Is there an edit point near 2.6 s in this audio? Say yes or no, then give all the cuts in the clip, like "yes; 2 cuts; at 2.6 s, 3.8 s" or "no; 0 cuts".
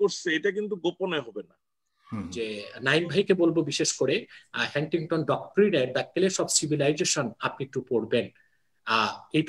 yes; 1 cut; at 2.6 s